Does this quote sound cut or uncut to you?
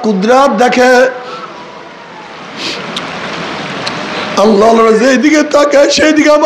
uncut